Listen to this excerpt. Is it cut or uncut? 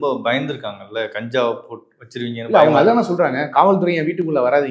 uncut